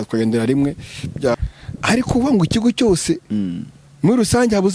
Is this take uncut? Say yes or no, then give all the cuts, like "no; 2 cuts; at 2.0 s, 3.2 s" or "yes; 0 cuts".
no; 1 cut; at 1.3 s